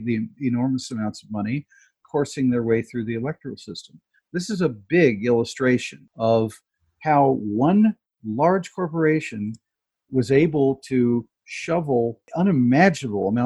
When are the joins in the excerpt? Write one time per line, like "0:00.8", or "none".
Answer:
0:06.0